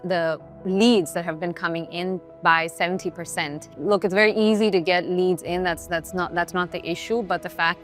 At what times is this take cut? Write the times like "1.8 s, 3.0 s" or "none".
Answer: none